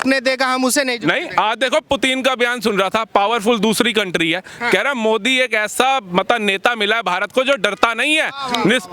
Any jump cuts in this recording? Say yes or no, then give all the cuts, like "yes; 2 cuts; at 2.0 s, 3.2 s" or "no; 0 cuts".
no; 0 cuts